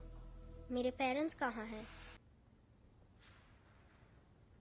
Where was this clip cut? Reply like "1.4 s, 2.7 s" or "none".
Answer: 2.2 s